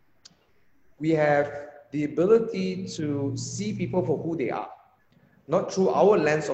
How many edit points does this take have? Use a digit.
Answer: 0